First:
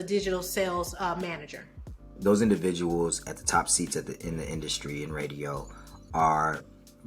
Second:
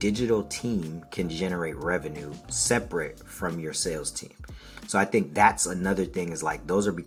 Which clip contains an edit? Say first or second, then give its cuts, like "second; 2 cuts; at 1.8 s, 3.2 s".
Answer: first; 1 cut; at 2.2 s